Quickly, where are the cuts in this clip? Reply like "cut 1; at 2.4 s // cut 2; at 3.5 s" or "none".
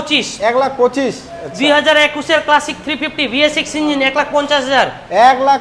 none